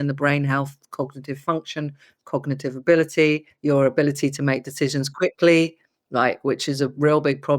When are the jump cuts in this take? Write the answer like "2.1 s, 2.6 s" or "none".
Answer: 3.5 s